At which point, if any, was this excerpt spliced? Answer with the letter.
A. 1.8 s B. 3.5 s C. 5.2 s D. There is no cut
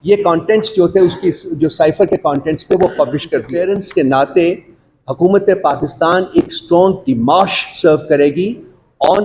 B